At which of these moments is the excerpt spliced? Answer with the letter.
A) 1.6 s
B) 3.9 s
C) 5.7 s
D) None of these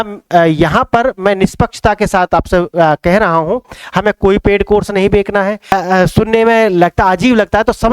C